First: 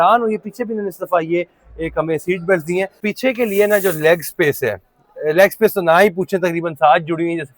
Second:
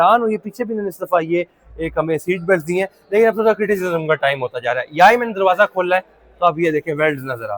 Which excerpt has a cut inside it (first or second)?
first